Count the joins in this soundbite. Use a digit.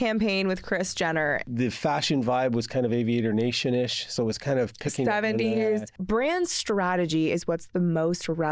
2